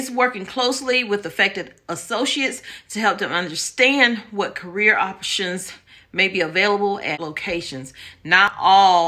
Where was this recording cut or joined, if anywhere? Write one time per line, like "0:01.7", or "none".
0:07.2